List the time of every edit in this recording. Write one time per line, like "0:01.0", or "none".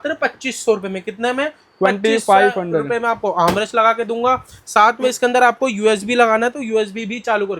none